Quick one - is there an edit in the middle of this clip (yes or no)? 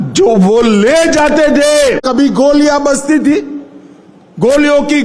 yes